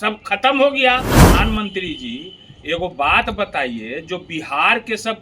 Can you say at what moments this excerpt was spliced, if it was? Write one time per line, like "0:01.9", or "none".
0:01.2